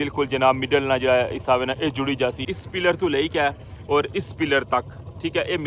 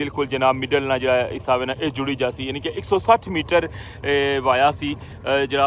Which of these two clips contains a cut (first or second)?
first